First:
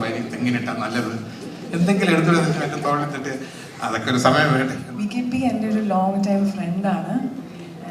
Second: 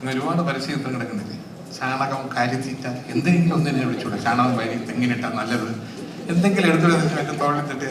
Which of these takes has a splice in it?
first; 1 cut; at 4.8 s

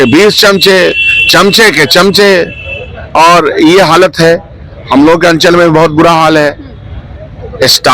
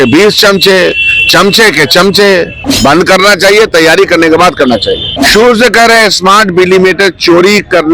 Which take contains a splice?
second; 2 cuts; at 2.6 s, 5.1 s

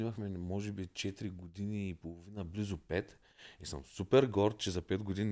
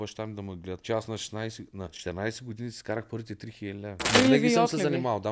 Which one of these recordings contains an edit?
second; 3 cuts; at 0.8 s, 2.0 s, 4.0 s

